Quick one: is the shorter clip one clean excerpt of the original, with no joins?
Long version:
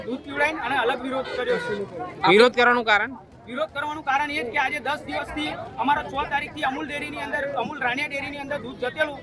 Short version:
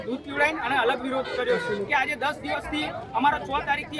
no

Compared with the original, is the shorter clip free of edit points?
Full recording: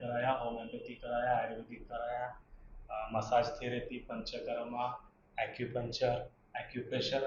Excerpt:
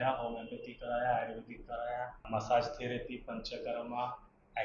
no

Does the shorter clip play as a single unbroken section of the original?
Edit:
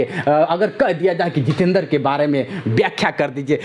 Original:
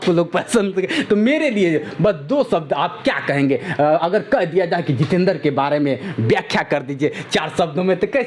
yes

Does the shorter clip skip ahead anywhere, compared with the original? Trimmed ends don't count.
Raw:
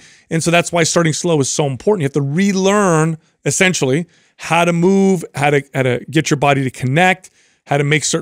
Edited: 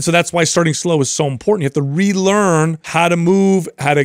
yes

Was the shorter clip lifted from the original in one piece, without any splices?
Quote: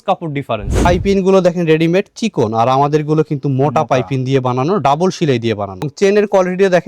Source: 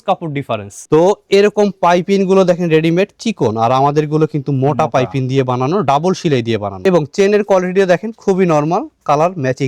no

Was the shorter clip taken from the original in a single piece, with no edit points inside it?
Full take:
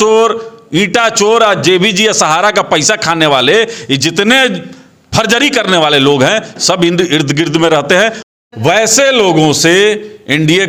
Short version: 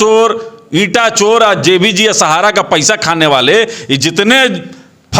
yes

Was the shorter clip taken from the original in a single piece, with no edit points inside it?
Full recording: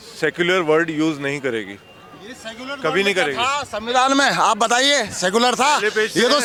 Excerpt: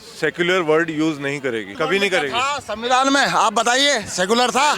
no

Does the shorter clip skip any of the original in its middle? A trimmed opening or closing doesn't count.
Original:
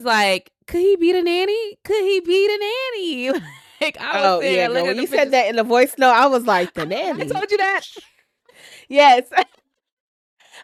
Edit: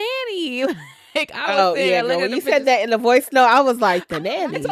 no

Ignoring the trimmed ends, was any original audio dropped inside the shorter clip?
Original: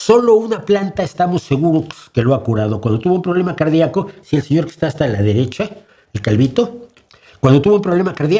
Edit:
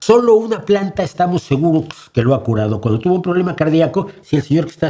no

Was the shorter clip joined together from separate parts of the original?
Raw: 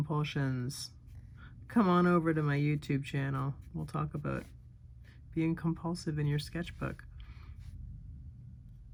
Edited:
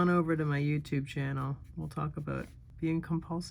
yes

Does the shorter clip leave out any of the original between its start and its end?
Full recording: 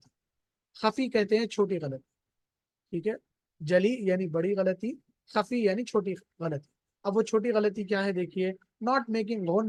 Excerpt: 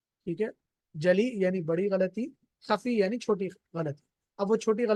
no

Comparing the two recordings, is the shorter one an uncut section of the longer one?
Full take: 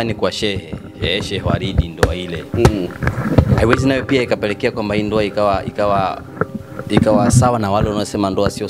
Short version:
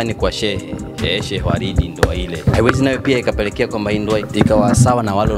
no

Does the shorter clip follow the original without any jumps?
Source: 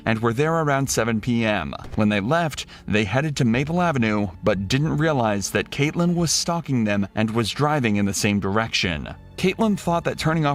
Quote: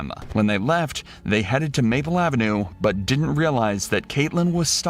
yes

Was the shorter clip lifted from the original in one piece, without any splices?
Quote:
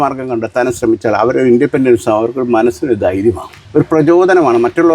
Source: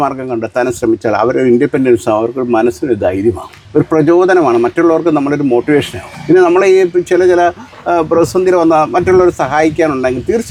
yes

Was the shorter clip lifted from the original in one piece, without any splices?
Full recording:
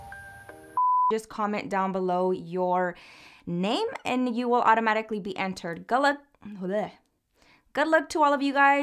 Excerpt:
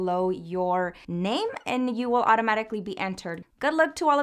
no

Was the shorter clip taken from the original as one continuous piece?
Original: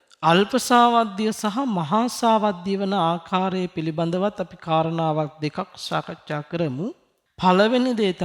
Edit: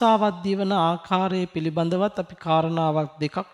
yes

